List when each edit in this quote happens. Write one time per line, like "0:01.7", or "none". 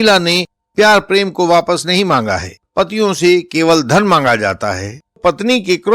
0:02.6
0:05.2